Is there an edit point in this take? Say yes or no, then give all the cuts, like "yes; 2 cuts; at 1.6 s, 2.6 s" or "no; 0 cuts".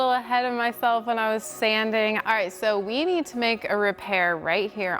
yes; 1 cut; at 2.2 s